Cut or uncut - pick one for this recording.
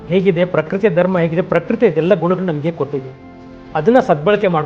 uncut